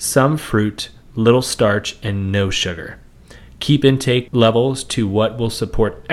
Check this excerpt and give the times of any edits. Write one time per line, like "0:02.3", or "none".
0:04.3